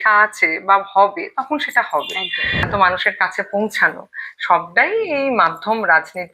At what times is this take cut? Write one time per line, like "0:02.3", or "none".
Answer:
0:02.7